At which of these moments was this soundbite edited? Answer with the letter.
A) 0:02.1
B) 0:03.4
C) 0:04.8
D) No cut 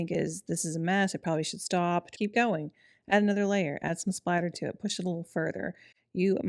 A